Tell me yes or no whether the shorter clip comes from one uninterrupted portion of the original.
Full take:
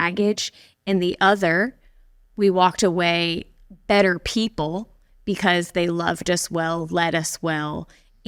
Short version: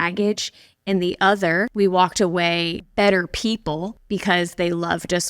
no